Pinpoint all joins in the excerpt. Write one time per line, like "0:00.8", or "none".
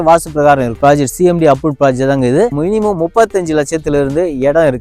0:02.5